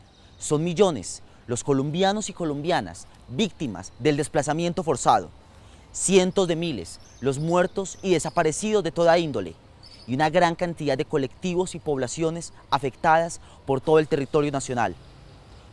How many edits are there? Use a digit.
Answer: 1